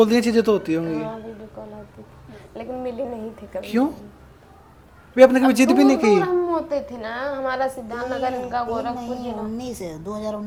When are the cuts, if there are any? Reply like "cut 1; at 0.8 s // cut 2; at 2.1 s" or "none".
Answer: none